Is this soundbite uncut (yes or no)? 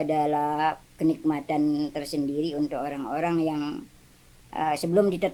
yes